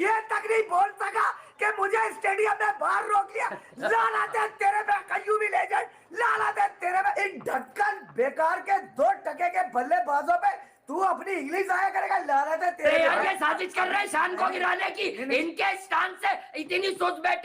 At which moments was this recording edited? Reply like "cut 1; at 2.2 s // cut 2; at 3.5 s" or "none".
cut 1; at 7.1 s // cut 2; at 12.9 s